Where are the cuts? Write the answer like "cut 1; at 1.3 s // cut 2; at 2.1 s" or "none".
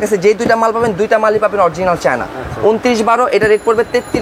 none